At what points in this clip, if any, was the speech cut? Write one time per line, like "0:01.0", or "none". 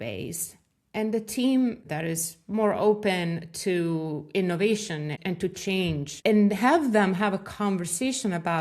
0:01.8
0:05.2
0:06.1